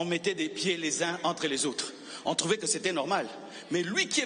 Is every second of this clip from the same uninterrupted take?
yes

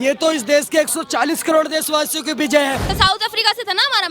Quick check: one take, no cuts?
no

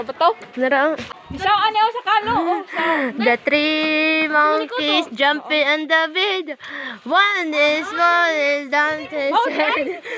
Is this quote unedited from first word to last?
no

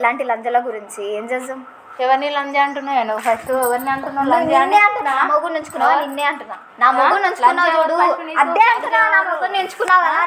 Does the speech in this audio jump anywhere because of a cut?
yes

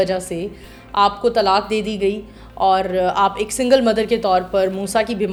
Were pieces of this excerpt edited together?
no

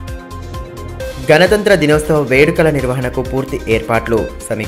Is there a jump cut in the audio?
no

